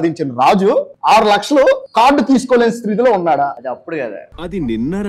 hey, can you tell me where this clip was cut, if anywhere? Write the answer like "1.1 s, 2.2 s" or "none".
0.9 s, 1.9 s, 3.6 s